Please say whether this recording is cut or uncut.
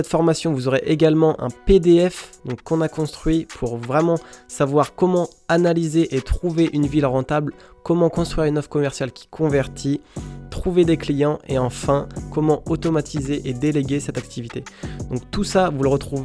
uncut